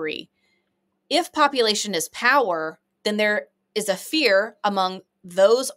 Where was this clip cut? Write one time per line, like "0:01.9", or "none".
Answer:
none